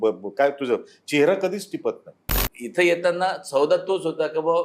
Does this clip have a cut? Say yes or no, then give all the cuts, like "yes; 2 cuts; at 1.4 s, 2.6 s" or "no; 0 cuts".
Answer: yes; 1 cut; at 2.4 s